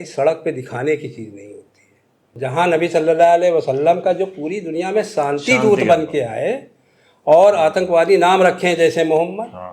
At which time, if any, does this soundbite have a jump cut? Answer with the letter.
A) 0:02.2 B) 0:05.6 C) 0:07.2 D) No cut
A